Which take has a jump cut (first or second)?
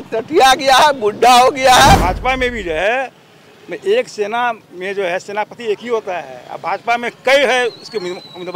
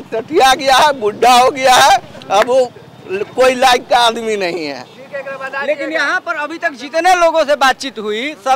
first